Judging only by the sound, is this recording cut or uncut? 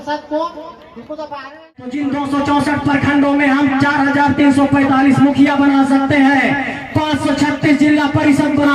cut